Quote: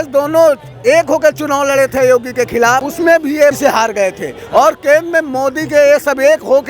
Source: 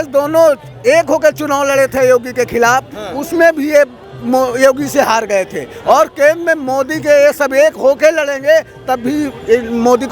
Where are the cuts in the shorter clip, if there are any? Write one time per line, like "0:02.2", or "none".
0:02.9
0:03.6